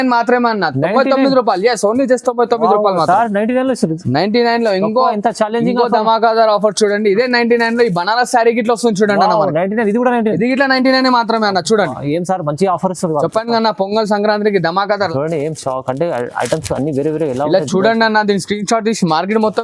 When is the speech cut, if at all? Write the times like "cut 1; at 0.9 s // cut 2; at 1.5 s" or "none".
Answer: cut 1; at 15.1 s